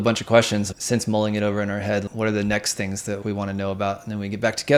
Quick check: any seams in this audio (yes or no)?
no